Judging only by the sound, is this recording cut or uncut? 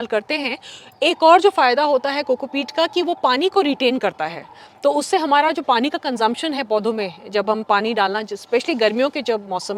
uncut